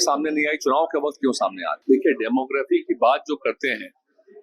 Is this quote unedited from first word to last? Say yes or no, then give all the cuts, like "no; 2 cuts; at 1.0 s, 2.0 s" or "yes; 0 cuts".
no; 1 cut; at 1.7 s